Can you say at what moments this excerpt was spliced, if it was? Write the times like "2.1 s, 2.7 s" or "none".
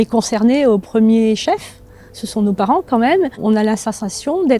3.4 s

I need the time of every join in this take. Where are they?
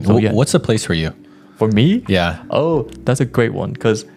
none

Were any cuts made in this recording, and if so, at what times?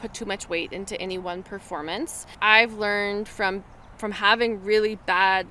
2.2 s

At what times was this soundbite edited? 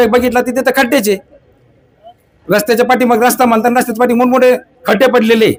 none

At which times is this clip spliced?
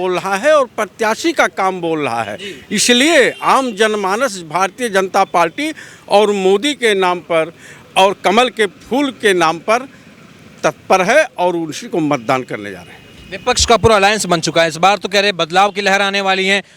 none

